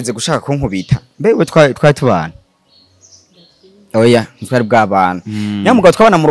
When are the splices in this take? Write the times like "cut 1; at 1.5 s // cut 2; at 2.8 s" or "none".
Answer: none